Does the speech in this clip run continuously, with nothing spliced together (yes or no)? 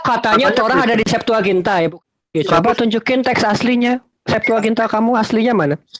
no